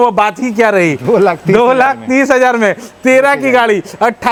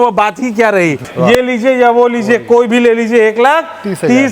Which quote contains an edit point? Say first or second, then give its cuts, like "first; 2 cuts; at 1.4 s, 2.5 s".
second; 1 cut; at 1.0 s